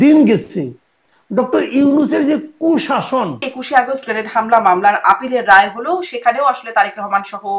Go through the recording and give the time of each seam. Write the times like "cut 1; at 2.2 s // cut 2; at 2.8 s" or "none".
cut 1; at 3.5 s

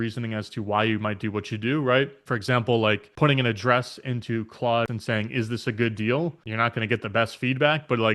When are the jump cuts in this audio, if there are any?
cut 1; at 2.2 s // cut 2; at 3.1 s // cut 3; at 4.9 s // cut 4; at 6.4 s

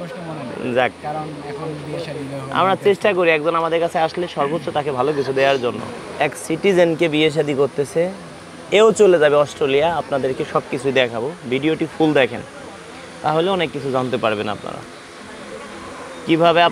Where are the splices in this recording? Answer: cut 1; at 5.9 s

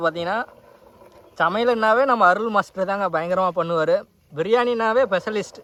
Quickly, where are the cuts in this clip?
none

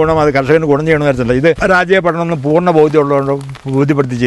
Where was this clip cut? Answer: cut 1; at 1.6 s

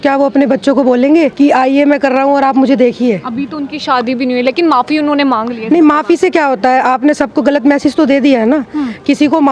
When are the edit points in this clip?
cut 1; at 1.3 s

